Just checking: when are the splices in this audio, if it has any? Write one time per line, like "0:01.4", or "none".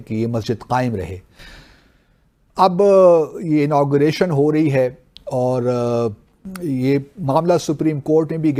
none